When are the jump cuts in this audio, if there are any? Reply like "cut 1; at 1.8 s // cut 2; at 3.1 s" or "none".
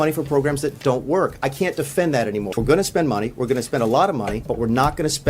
cut 1; at 2.5 s // cut 2; at 4.4 s